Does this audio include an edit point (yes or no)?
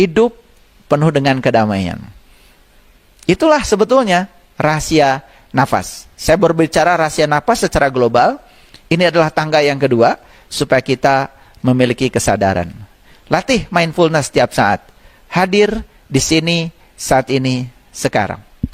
no